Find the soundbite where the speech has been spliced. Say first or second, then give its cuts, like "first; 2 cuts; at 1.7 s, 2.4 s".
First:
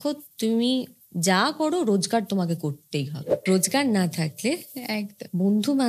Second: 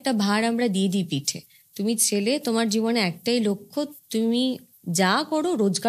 first; 1 cut; at 3.3 s